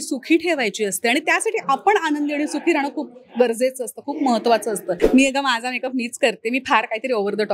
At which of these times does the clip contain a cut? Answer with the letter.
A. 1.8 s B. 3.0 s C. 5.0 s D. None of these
C